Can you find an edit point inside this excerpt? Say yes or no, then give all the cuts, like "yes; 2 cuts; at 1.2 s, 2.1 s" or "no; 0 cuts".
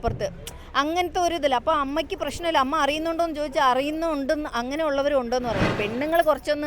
yes; 1 cut; at 5.7 s